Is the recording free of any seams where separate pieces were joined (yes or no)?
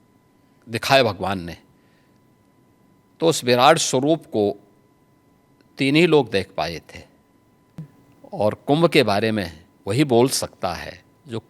no